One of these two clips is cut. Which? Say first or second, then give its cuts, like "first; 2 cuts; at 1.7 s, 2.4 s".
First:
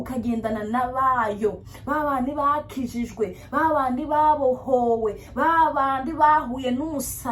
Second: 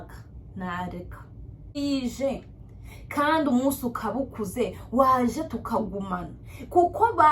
second; 1 cut; at 1.8 s